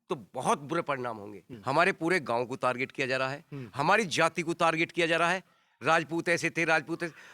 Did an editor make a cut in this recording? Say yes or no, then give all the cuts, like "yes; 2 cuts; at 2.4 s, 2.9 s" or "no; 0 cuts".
yes; 1 cut; at 1.5 s